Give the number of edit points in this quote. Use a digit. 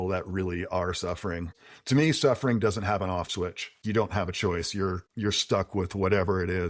3